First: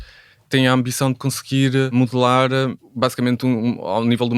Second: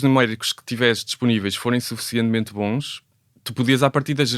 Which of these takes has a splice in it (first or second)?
first